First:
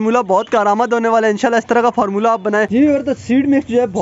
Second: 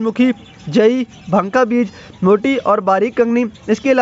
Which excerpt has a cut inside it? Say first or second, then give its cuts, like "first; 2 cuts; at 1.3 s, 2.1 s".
first; 1 cut; at 2.7 s